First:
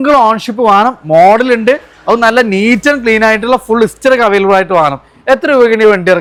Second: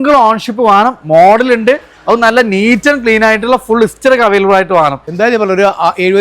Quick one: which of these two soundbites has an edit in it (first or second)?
second